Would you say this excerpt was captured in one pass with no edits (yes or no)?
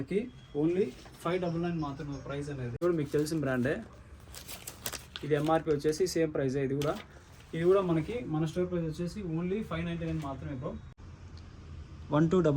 no